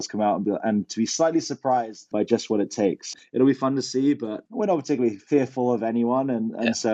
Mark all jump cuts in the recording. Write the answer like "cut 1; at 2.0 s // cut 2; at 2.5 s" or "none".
cut 1; at 2.1 s // cut 2; at 3.1 s // cut 3; at 4.4 s